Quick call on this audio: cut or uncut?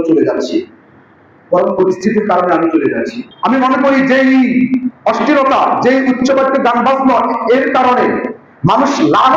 cut